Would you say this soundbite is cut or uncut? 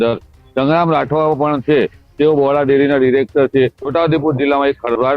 cut